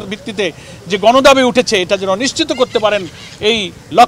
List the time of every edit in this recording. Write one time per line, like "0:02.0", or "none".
none